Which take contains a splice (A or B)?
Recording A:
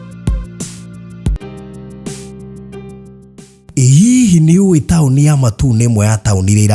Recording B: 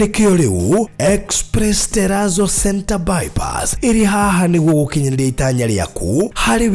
A